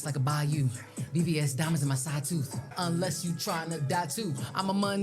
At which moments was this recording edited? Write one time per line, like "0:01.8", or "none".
0:02.6